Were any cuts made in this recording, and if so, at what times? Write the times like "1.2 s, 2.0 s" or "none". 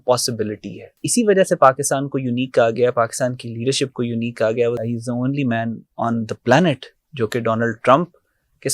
1.0 s, 4.8 s